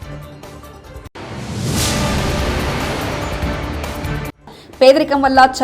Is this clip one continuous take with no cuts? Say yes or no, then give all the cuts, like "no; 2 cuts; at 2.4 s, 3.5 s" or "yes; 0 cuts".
no; 2 cuts; at 1.1 s, 4.3 s